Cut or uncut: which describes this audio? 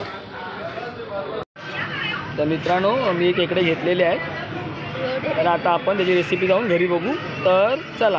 uncut